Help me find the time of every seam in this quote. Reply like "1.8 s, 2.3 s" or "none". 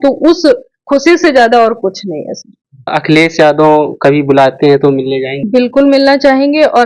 2.9 s, 5.4 s